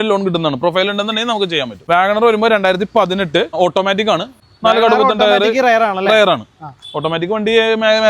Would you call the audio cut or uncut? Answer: cut